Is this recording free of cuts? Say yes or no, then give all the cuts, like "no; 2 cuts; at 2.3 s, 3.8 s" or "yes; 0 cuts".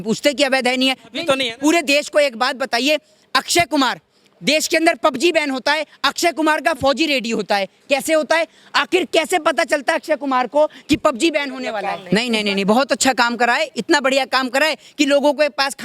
no; 1 cut; at 11.9 s